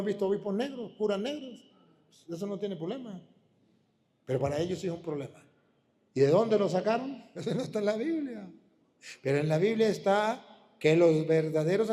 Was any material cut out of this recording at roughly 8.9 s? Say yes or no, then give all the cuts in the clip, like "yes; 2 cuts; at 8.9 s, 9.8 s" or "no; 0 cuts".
no; 1 cut; at 7.3 s